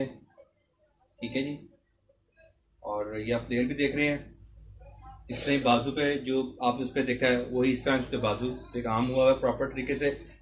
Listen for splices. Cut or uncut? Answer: uncut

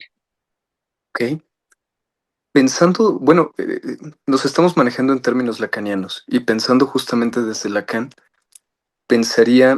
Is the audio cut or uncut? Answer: uncut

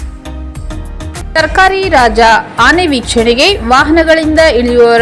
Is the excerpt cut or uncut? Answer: cut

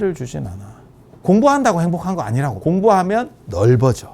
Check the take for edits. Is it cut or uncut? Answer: cut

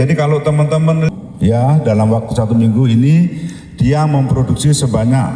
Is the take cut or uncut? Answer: cut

